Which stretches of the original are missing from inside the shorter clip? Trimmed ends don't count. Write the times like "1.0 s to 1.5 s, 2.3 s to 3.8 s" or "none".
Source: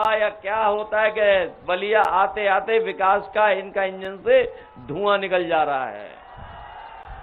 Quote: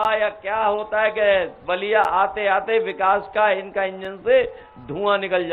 none